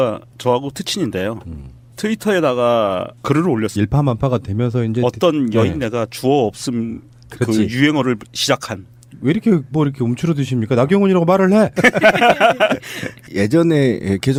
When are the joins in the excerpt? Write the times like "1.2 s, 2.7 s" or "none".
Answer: none